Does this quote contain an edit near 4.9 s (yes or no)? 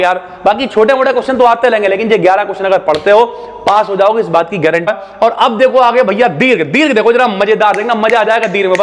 yes